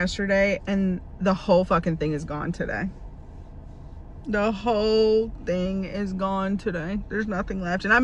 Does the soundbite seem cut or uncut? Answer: uncut